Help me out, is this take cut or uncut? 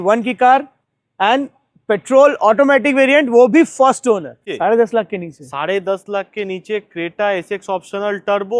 cut